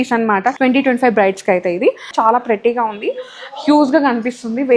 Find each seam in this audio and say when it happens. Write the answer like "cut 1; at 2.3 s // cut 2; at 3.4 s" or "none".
cut 1; at 2.1 s